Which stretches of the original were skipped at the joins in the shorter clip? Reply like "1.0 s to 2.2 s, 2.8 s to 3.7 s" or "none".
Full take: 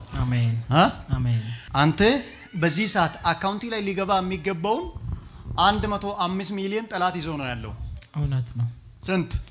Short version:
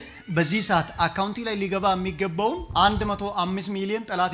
4.9 s to 5.5 s